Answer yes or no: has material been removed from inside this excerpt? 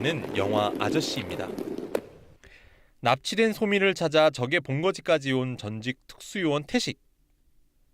yes